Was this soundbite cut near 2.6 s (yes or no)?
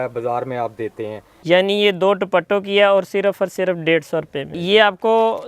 no